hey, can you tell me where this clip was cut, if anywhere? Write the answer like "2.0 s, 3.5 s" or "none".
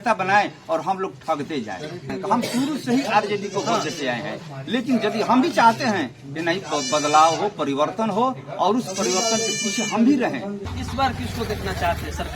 2.1 s, 10.8 s